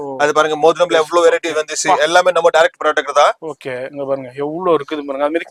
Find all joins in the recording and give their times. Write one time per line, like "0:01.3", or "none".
none